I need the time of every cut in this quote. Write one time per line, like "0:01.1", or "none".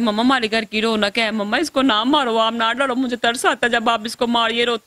none